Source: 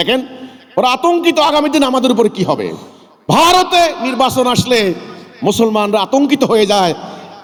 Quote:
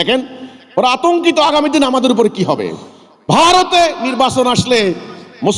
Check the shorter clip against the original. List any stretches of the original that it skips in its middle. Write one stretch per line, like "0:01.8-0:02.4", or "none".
none